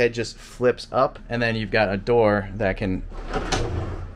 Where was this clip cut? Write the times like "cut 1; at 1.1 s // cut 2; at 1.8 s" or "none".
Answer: cut 1; at 1.2 s

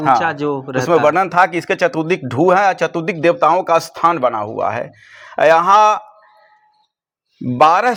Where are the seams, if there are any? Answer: none

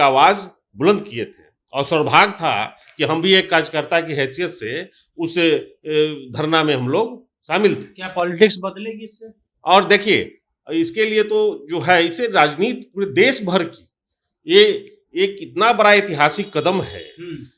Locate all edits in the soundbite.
none

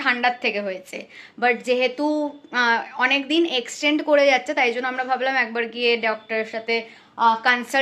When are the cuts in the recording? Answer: none

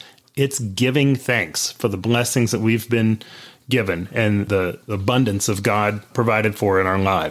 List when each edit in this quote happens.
cut 1; at 4.5 s // cut 2; at 6.1 s

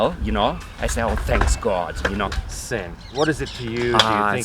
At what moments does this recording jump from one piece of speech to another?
cut 1; at 2.4 s

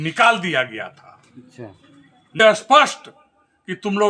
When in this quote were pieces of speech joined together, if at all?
cut 1; at 2.4 s

